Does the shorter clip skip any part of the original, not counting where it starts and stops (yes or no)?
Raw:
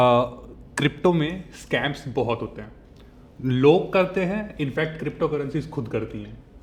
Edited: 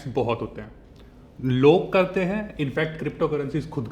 no